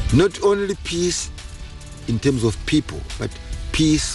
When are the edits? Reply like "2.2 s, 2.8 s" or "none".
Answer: none